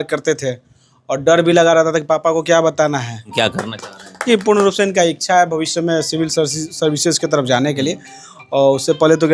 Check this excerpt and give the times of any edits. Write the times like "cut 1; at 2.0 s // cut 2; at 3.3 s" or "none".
cut 1; at 3.3 s